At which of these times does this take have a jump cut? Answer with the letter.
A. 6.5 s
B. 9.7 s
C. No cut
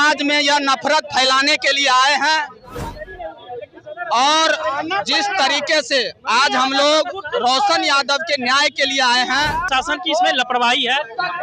B